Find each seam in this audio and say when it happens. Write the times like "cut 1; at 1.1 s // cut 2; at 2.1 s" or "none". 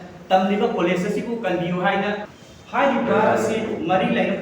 cut 1; at 2.3 s